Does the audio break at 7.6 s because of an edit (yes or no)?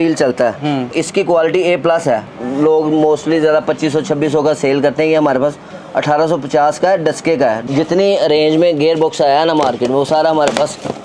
yes